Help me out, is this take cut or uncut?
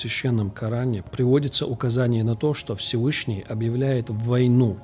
cut